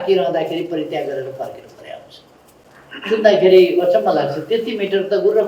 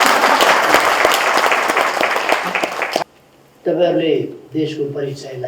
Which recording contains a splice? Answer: second; 1 cut; at 3.0 s

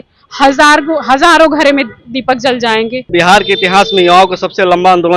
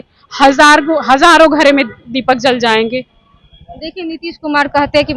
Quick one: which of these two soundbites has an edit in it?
first; 1 cut; at 3.0 s

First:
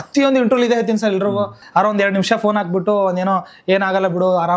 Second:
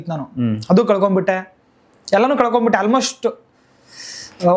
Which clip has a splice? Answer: first; 1 cut; at 1.6 s

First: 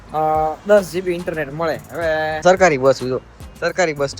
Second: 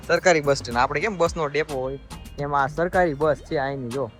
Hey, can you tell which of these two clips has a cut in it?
first; 1 cut; at 2.4 s

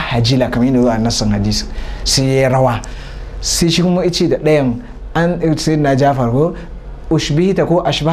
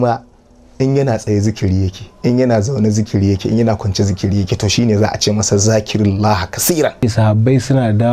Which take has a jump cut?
second; 1 cut; at 6.9 s

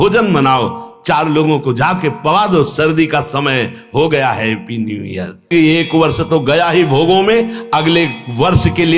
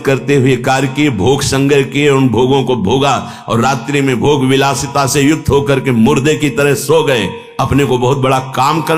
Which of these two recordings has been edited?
first; 1 cut; at 5.5 s

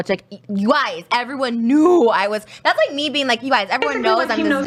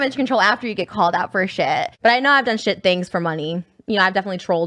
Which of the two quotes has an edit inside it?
second; 1 cut; at 1.9 s

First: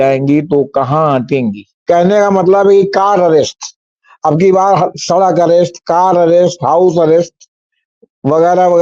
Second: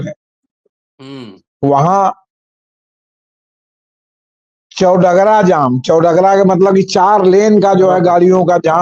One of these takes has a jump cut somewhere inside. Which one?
first; 1 cut; at 1.7 s

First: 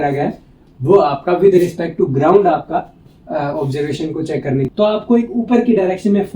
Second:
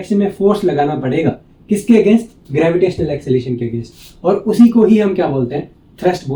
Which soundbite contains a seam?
first; 1 cut; at 4.7 s

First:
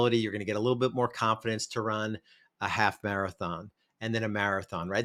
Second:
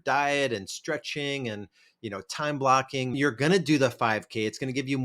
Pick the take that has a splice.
second; 1 cut; at 3.1 s

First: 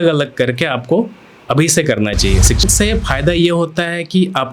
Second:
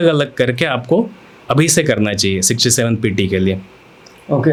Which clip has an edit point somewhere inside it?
first; 1 cut; at 2.6 s

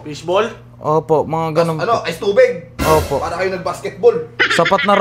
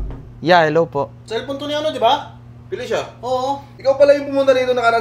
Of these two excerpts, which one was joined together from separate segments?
second; 1 cut; at 3.7 s

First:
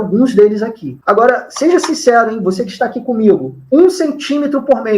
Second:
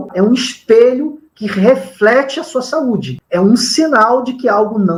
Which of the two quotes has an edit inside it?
first; 1 cut; at 0.9 s

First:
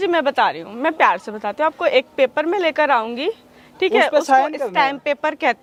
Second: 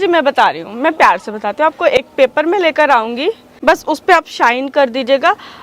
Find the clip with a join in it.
second; 1 cut; at 3.5 s

